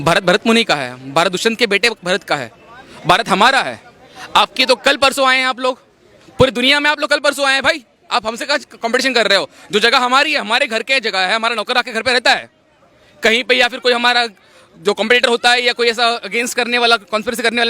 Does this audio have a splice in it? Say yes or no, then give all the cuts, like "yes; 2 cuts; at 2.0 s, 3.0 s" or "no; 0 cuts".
no; 0 cuts